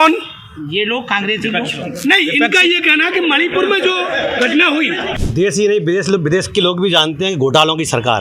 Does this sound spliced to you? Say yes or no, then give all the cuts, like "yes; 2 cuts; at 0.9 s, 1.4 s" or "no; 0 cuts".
yes; 1 cut; at 5.1 s